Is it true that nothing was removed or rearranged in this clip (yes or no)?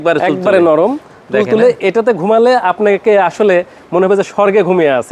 yes